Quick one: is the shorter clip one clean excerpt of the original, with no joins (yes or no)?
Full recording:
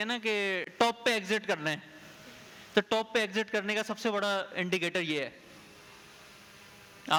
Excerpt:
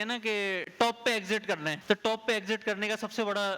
no